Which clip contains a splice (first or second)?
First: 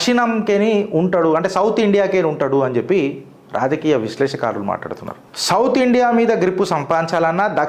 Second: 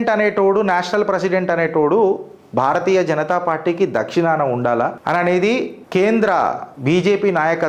second